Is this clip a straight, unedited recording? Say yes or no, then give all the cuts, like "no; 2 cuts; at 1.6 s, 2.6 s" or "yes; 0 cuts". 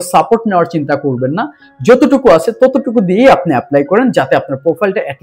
yes; 0 cuts